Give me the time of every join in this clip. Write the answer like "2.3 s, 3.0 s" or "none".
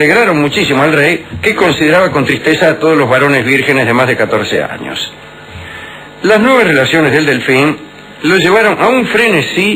2.9 s